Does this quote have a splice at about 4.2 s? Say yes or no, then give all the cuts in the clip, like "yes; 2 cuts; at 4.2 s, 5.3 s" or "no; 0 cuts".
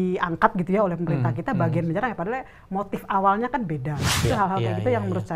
yes; 1 cut; at 4.2 s